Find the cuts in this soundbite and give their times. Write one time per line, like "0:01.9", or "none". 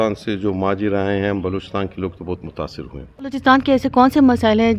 0:03.4